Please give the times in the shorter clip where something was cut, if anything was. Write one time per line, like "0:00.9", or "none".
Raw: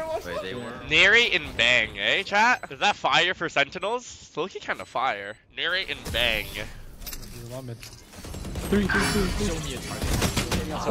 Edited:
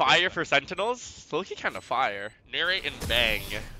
none